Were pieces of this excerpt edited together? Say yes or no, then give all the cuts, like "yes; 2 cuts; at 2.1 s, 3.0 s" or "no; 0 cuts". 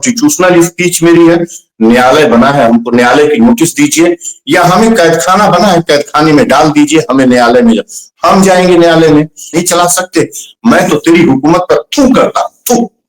yes; 1 cut; at 9.5 s